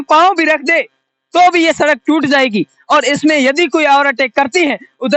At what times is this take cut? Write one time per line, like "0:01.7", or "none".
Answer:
none